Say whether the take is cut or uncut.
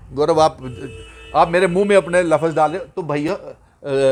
uncut